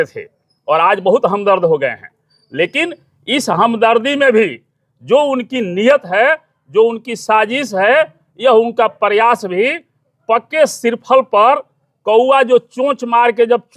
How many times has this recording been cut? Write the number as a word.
zero